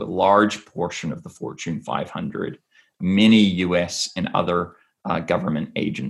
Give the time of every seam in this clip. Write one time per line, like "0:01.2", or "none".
none